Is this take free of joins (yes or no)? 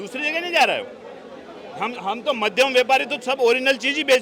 yes